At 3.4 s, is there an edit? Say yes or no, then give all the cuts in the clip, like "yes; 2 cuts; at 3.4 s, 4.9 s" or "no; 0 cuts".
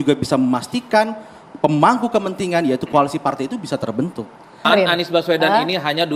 no; 1 cut; at 4.7 s